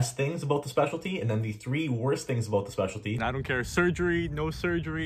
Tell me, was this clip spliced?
yes; 1 cut; at 3.2 s

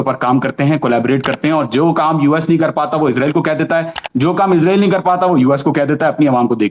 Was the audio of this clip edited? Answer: no; 0 cuts

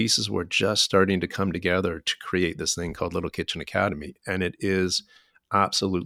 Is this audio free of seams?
yes; 0 cuts

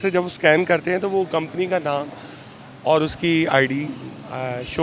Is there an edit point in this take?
no; 0 cuts

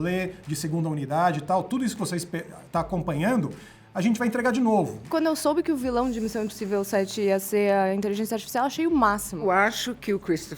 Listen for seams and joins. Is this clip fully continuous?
no; 2 cuts; at 5.1 s, 9.4 s

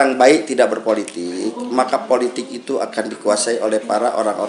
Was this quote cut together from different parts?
no; 0 cuts

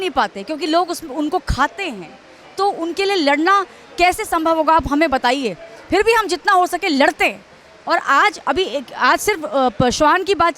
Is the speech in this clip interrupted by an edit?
no; 0 cuts

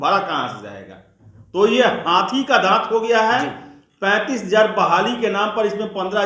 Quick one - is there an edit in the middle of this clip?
no; 0 cuts

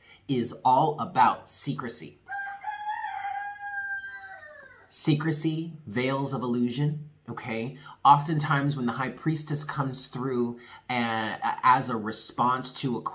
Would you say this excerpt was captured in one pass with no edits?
yes; 0 cuts

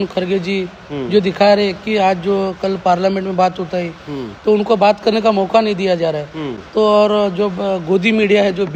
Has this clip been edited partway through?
no; 0 cuts

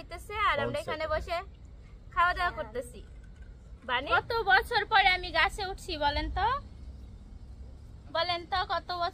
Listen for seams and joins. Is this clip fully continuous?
no; 1 cut; at 4.1 s

